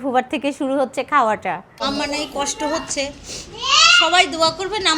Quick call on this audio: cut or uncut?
cut